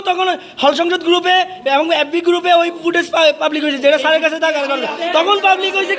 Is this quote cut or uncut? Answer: uncut